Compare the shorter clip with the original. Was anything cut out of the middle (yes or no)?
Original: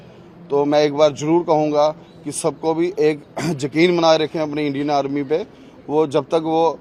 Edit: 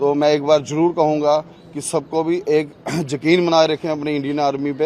no